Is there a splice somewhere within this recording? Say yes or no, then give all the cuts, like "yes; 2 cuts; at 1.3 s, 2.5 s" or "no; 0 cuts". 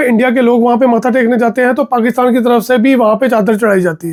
no; 0 cuts